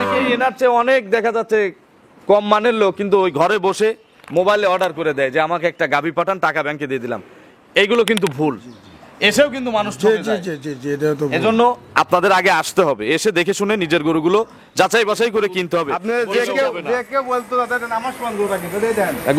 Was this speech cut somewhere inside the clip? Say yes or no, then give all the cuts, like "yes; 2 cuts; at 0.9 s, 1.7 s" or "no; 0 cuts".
yes; 1 cut; at 16.0 s